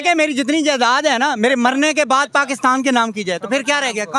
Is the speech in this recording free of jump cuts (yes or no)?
yes